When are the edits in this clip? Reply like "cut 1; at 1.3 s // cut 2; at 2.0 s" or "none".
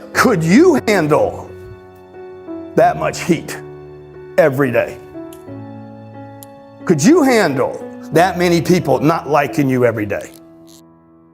cut 1; at 10.2 s